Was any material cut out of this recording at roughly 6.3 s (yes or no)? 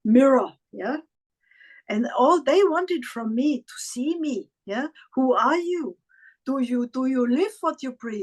no